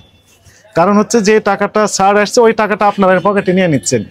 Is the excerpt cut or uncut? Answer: uncut